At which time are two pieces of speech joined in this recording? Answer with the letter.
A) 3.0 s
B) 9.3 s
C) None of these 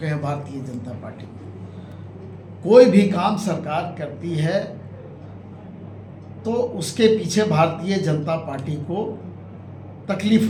C